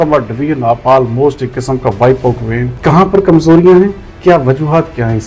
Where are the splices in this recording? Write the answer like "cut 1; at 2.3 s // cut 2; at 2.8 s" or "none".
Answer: cut 1; at 2.7 s